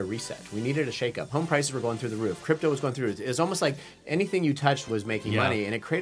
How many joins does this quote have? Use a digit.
2